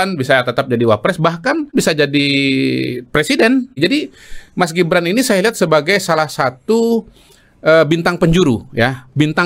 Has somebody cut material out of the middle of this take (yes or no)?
yes